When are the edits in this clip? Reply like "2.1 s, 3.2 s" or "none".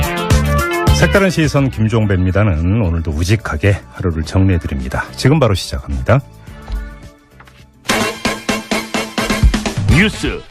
none